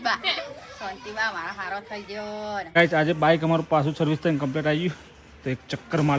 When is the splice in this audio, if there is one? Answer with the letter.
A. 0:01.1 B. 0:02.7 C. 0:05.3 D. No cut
B